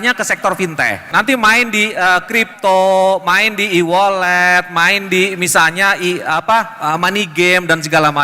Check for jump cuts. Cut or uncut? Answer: cut